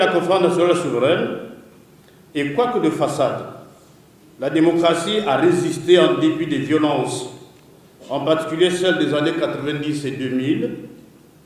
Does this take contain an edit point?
no; 0 cuts

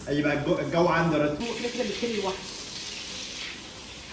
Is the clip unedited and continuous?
no; 1 cut; at 1.4 s

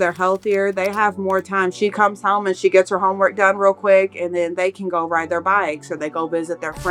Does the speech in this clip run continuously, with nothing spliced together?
yes; 0 cuts

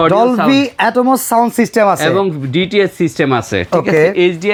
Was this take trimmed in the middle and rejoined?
no; 0 cuts

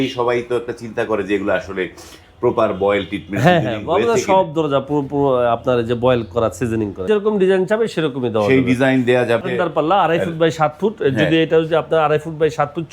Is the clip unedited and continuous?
no; 2 cuts; at 7.0 s, 9.4 s

